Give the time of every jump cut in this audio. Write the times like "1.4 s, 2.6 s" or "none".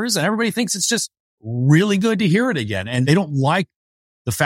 3.0 s